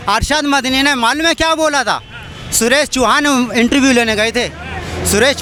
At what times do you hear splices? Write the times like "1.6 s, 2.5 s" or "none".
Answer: none